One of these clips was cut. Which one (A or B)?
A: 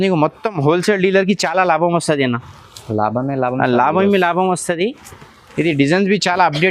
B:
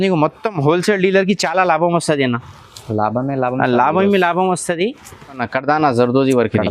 B